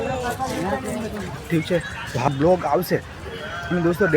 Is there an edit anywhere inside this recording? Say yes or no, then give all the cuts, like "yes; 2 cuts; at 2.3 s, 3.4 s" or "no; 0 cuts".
yes; 1 cut; at 2.3 s